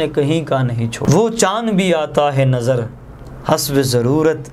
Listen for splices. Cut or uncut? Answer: cut